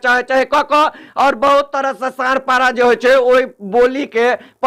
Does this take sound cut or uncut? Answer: uncut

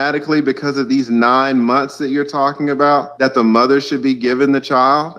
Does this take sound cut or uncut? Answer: cut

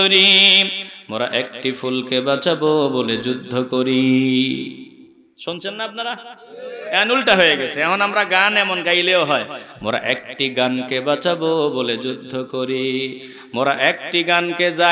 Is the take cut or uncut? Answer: uncut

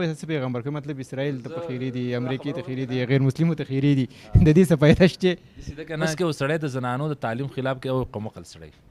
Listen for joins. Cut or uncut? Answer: cut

